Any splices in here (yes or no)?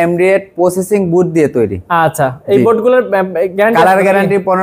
no